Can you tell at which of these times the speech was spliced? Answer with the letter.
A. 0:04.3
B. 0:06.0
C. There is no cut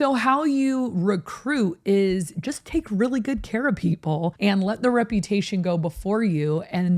A